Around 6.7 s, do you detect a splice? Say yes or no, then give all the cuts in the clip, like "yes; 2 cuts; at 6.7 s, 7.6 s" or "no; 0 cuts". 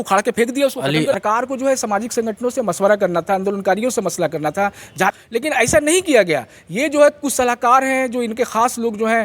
no; 2 cuts; at 1.2 s, 5.1 s